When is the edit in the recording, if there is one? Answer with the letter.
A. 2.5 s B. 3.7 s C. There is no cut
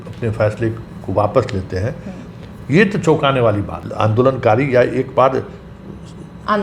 B